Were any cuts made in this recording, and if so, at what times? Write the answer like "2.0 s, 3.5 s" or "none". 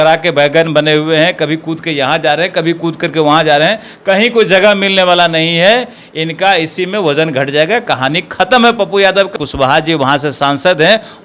9.3 s